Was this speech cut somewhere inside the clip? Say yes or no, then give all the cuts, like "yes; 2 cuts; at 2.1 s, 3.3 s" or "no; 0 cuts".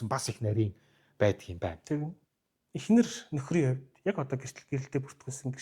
yes; 1 cut; at 2.2 s